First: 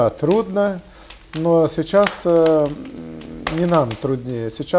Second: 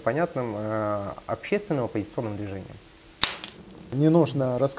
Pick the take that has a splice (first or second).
second